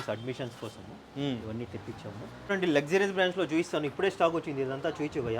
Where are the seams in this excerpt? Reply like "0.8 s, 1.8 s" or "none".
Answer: 2.5 s